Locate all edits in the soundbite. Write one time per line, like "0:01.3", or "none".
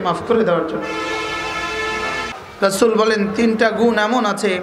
0:02.3